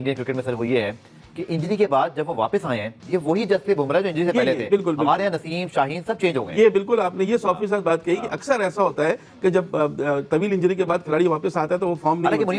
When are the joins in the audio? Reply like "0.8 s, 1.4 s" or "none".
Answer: none

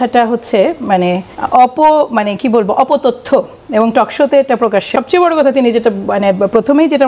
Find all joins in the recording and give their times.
1.3 s, 4.9 s

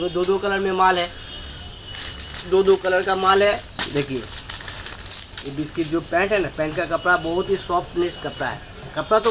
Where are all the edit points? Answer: none

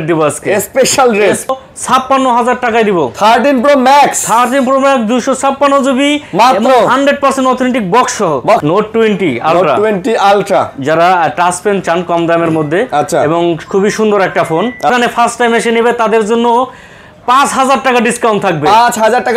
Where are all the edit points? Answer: 1.5 s, 8.6 s, 14.9 s

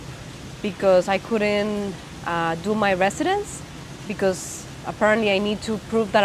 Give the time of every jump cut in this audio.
none

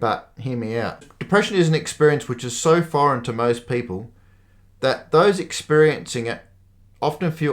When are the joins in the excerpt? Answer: 1.1 s

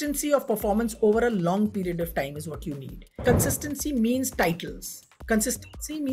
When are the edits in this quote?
3.2 s

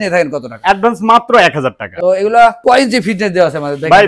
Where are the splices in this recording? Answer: 1.9 s

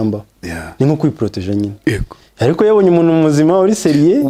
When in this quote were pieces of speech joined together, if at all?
none

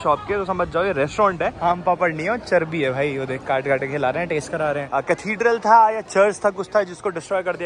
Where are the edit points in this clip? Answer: 1.6 s, 4.8 s

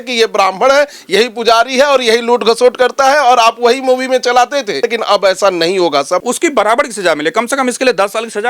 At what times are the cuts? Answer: 4.8 s, 6.2 s

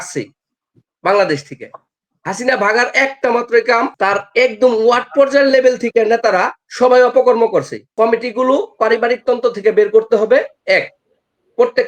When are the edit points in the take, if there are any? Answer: 3.9 s, 7.8 s

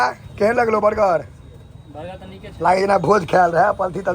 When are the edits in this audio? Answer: none

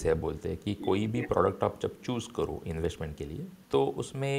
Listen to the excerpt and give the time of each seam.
3.5 s

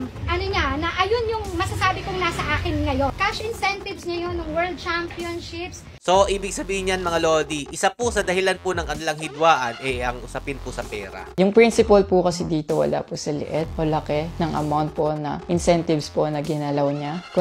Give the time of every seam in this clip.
3.1 s, 5.9 s, 11.2 s

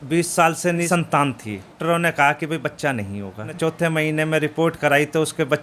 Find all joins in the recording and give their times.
0.9 s, 1.8 s, 3.5 s

